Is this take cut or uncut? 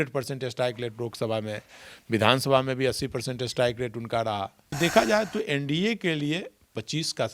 cut